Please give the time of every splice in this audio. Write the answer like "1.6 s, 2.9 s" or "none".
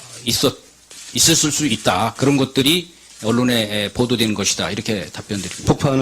5.0 s